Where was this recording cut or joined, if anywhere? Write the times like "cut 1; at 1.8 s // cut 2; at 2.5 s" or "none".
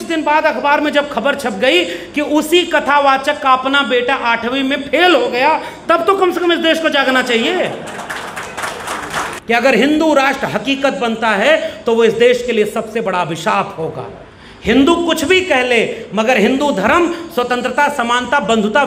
cut 1; at 9.3 s